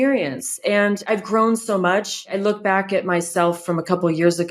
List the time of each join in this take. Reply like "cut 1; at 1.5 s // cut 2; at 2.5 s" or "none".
cut 1; at 1.1 s // cut 2; at 2.3 s